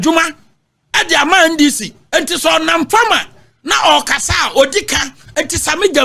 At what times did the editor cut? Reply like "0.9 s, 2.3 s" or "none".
none